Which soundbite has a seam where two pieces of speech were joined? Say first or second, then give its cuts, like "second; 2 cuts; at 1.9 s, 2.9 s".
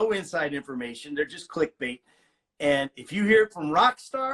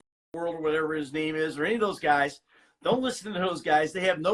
first; 1 cut; at 2.1 s